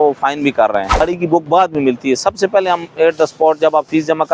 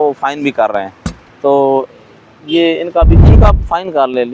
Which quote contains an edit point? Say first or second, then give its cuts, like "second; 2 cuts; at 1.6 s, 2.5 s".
first; 1 cut; at 1.0 s